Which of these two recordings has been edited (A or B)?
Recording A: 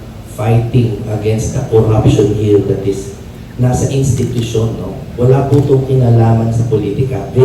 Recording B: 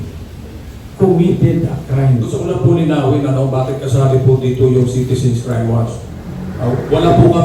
B